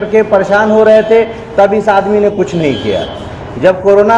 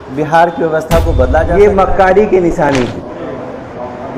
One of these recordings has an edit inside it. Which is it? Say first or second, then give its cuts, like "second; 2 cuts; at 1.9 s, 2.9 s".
second; 1 cut; at 1.5 s